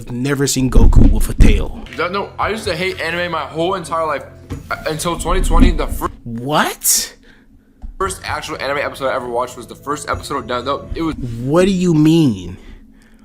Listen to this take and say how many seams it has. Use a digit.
1